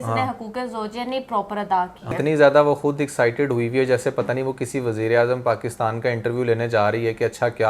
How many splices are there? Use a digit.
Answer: 1